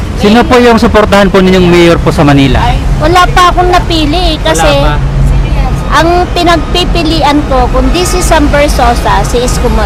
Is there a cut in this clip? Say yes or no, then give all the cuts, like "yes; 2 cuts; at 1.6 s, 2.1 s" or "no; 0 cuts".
no; 0 cuts